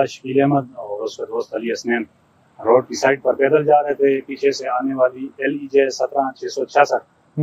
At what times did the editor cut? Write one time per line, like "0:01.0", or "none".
none